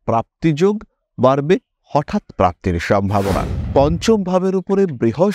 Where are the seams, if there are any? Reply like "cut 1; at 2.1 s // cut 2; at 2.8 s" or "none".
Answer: cut 1; at 3.5 s